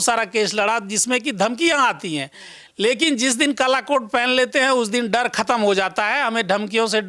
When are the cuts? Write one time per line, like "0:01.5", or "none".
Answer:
none